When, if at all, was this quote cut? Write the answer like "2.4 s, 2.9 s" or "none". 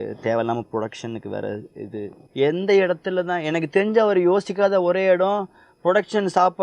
2.2 s